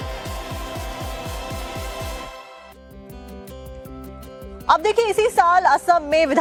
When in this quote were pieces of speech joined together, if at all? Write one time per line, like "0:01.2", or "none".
none